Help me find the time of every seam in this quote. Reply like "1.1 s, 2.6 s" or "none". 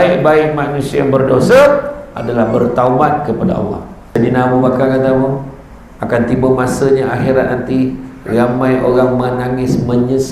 4.0 s

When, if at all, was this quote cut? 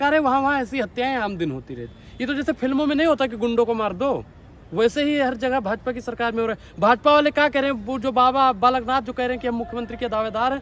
none

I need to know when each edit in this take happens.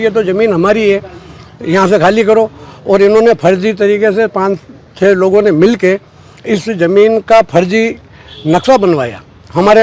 none

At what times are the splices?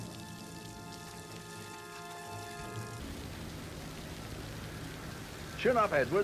3.0 s

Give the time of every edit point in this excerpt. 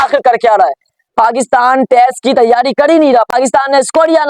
3.3 s

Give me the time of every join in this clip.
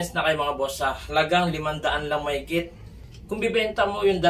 none

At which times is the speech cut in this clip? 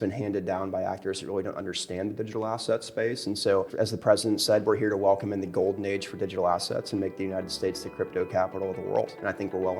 none

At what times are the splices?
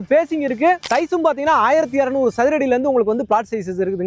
none

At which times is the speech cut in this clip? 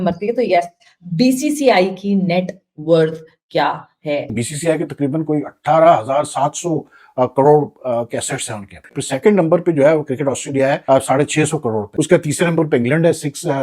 4.3 s, 8.9 s, 10.8 s, 11.8 s

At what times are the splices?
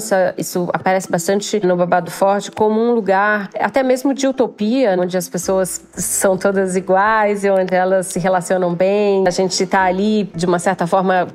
9.2 s

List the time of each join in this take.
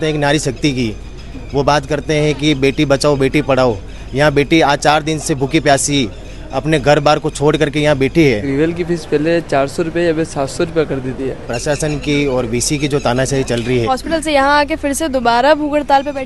8.5 s, 11.5 s, 13.9 s

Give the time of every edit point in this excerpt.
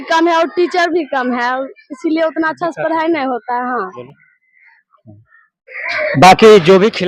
4.0 s

